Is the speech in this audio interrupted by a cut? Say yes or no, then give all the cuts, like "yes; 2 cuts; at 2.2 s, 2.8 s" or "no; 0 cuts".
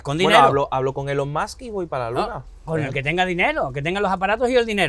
no; 0 cuts